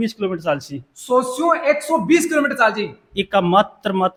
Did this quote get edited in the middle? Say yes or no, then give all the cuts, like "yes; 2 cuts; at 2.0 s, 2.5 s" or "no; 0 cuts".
no; 0 cuts